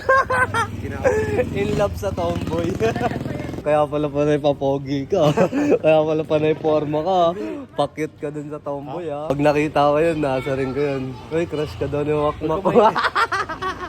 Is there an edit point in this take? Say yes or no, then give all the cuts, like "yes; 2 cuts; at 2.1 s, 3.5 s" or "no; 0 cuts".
yes; 2 cuts; at 3.5 s, 9.3 s